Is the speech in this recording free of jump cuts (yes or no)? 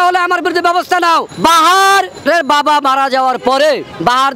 yes